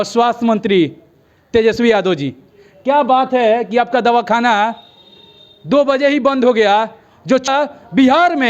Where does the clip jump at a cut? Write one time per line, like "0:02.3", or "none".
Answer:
0:07.5

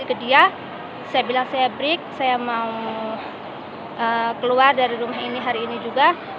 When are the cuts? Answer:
none

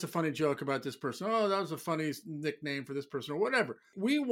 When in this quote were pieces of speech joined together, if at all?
none

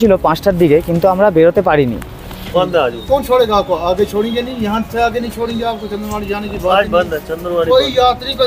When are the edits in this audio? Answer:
0:02.5

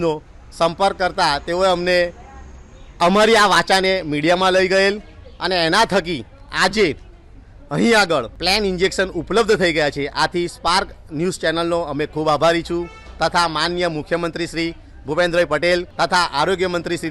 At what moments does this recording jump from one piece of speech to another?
0:08.3
0:15.9

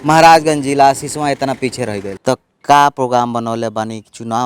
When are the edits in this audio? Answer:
0:02.1

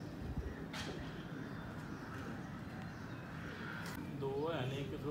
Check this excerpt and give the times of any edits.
0:04.0

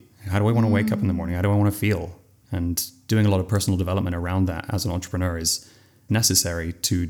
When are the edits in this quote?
0:06.1

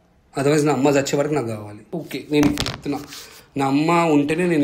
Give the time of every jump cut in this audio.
0:02.0

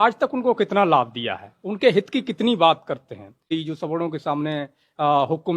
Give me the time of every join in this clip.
0:03.5

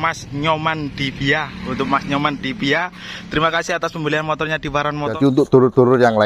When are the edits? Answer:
0:05.2

